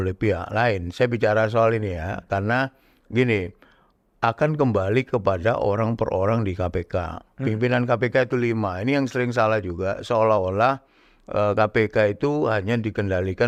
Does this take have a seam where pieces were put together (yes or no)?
no